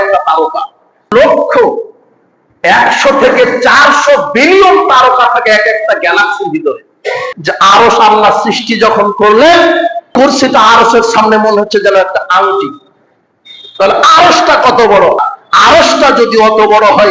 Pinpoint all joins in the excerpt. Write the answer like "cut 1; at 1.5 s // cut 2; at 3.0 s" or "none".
cut 1; at 1.1 s // cut 2; at 7.3 s // cut 3; at 10.1 s // cut 4; at 15.3 s